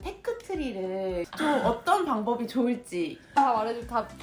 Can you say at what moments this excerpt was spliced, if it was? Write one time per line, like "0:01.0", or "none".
0:01.3